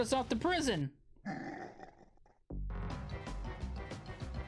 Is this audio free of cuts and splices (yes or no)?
yes